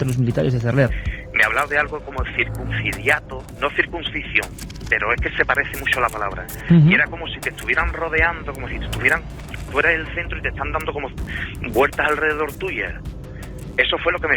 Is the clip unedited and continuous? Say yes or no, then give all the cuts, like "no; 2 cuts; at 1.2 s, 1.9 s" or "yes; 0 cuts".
no; 1 cut; at 1.0 s